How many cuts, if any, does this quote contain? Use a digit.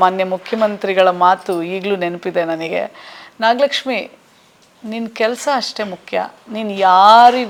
0